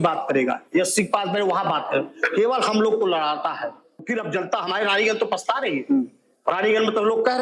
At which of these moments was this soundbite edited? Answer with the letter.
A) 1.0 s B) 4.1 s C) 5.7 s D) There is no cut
B